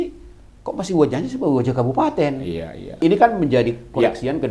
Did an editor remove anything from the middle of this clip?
yes; 1 cut; at 3.0 s

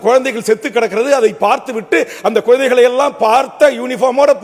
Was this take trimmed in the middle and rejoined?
no; 0 cuts

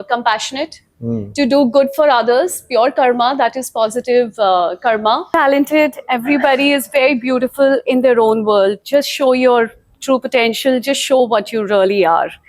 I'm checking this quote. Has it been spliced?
yes; 1 cut; at 5.3 s

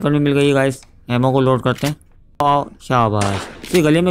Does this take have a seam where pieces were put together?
yes; 1 cut; at 2.4 s

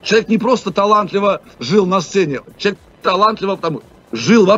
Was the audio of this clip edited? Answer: no; 0 cuts

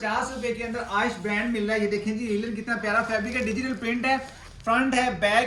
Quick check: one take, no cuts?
yes; 0 cuts

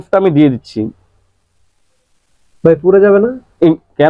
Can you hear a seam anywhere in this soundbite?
no; 0 cuts

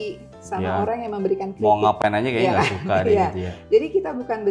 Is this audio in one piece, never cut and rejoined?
yes; 0 cuts

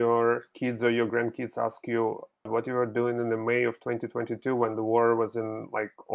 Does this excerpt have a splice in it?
yes; 1 cut; at 2.5 s

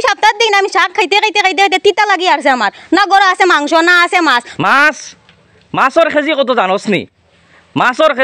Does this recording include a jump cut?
yes; 1 cut; at 4.5 s

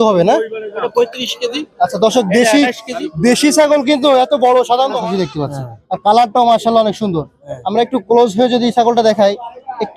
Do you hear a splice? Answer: yes; 1 cut; at 5.0 s

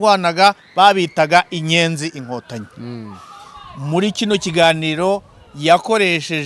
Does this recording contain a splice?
no; 0 cuts

